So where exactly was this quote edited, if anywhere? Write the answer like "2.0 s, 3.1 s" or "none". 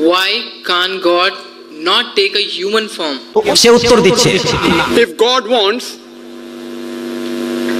4.6 s